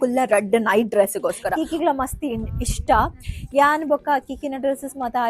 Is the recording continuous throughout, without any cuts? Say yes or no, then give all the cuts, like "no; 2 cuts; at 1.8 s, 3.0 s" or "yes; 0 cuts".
no; 1 cut; at 1.6 s